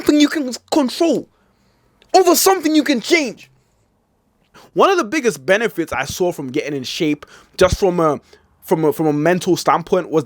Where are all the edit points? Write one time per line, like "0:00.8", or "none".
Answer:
0:04.6